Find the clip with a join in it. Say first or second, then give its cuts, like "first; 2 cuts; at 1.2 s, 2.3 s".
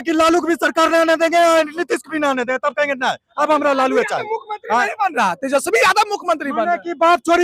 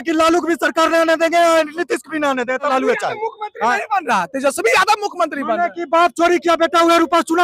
second; 1 cut; at 2.7 s